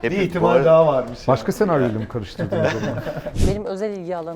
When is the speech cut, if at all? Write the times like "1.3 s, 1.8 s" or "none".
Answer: 3.3 s